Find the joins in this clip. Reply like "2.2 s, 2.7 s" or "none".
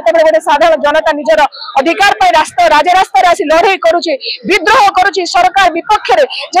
none